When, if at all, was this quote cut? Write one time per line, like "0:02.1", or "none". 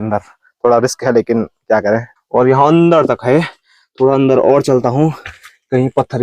0:02.1